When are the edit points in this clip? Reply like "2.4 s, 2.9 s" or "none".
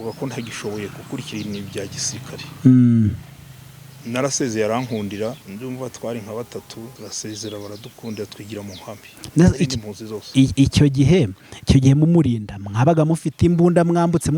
5.4 s, 6.9 s